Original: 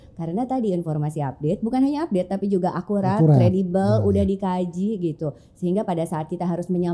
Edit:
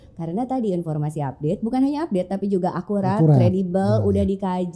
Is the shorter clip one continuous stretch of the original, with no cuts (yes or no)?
yes